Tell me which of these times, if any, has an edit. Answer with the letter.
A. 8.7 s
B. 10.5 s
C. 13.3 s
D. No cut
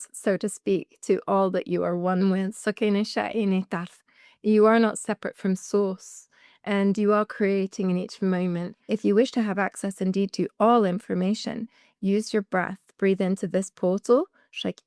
A